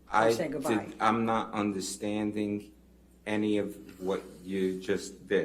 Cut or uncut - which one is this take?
uncut